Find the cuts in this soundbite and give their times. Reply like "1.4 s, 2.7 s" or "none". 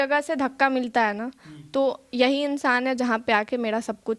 none